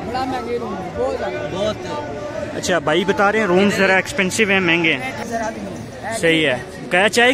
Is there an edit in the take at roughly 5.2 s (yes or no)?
yes